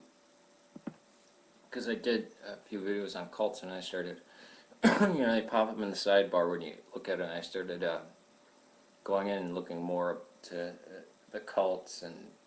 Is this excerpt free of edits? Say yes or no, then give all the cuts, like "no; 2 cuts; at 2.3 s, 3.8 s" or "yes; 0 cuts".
yes; 0 cuts